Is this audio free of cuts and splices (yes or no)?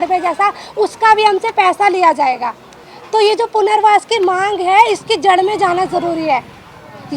yes